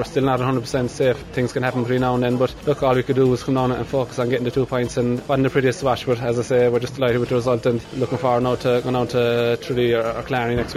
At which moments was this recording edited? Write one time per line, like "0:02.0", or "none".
0:01.2
0:02.6
0:05.2
0:07.9